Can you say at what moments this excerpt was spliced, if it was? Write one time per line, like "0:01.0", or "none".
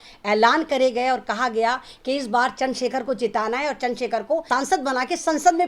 0:04.5